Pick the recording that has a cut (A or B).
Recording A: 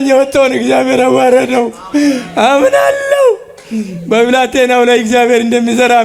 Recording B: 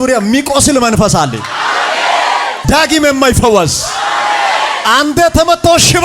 B